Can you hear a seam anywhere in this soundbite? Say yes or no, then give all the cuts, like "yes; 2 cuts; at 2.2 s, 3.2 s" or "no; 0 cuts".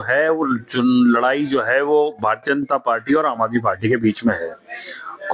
no; 0 cuts